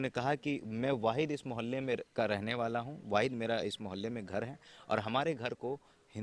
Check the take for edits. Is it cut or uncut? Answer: uncut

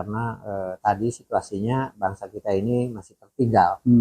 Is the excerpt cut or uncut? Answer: uncut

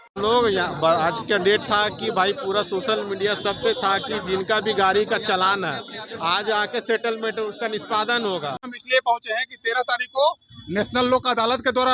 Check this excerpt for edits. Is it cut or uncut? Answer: cut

